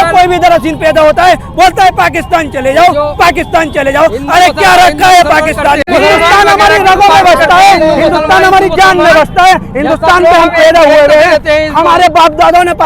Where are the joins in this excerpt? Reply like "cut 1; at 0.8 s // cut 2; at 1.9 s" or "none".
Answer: cut 1; at 5.8 s